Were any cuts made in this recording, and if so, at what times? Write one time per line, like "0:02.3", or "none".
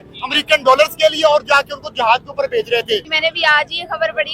0:03.1

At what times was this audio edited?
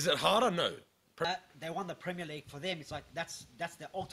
0:01.2

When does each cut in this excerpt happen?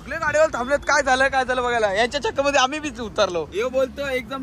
0:03.5

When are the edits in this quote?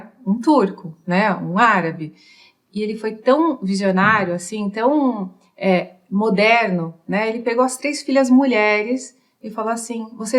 none

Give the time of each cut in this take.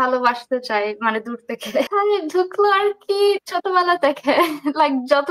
0:01.9

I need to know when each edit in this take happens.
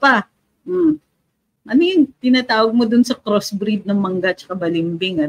none

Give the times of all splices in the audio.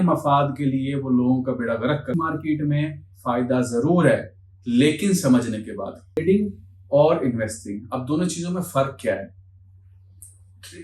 0:02.1
0:06.2

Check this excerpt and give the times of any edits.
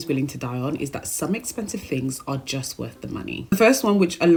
none

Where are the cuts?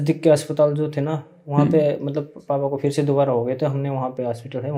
none

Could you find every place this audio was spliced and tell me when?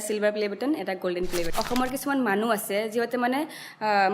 0:01.5

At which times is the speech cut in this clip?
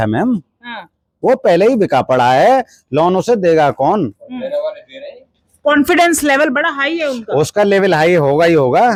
none

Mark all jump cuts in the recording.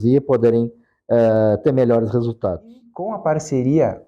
0:03.1

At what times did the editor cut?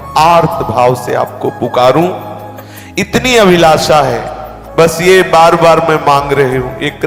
none

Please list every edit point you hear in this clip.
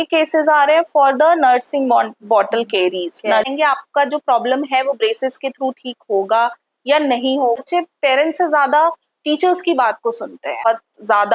0:03.5
0:07.6
0:10.6

